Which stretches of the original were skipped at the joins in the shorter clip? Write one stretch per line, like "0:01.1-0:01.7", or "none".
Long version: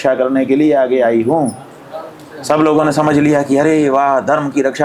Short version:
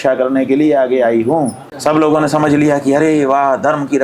0:01.6-0:02.3